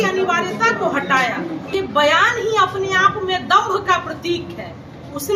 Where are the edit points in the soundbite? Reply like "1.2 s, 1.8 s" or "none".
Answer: 1.7 s